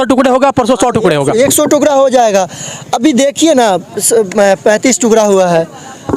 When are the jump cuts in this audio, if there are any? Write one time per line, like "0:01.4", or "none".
none